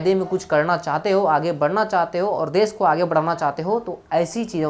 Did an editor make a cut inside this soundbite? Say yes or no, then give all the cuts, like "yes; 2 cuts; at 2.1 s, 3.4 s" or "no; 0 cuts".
no; 0 cuts